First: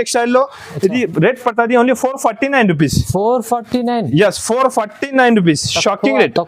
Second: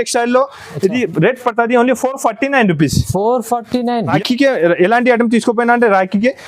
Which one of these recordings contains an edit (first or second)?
second